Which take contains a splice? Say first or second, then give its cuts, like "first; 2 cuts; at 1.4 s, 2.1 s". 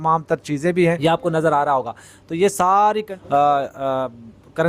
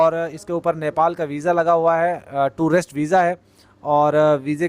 first; 2 cuts; at 1.0 s, 3.2 s